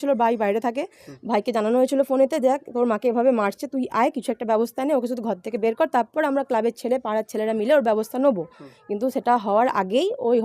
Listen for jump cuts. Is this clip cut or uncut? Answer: uncut